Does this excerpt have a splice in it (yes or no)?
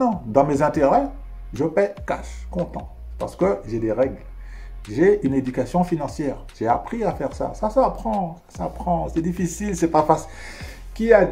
no